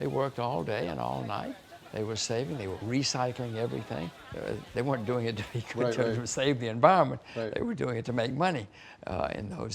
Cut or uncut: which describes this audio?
cut